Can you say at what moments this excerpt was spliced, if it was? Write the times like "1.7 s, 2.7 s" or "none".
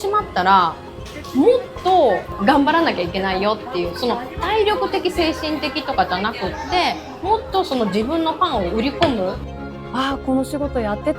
2.3 s, 9.5 s